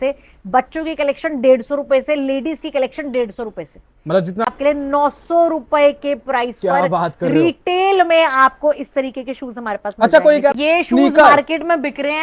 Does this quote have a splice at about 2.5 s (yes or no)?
no